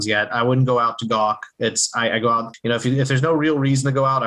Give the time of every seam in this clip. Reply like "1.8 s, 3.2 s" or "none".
2.5 s